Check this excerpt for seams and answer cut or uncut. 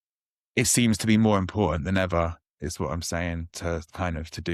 uncut